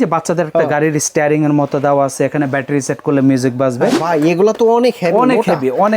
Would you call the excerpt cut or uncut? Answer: cut